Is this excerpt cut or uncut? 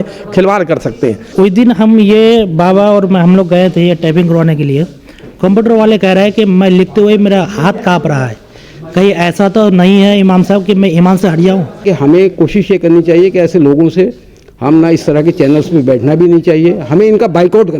cut